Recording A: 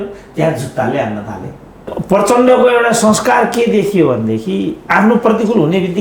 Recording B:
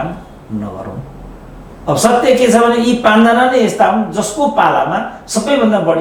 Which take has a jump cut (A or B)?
A